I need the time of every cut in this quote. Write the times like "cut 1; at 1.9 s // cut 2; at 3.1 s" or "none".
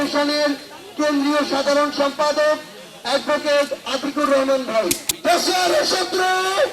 cut 1; at 5.1 s